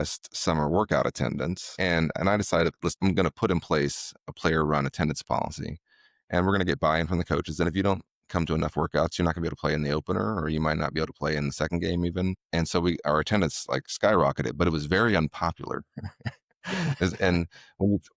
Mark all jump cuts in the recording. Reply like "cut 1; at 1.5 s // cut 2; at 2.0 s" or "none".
cut 1; at 1.7 s // cut 2; at 2.9 s // cut 3; at 12.4 s